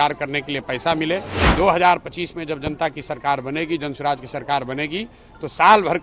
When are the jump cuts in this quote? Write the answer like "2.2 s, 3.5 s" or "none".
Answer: 1.4 s